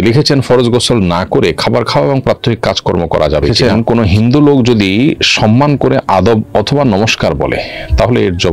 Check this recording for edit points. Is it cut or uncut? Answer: cut